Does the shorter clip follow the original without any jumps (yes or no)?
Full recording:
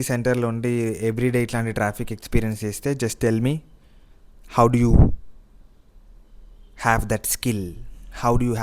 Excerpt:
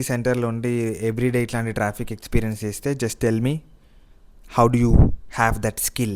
no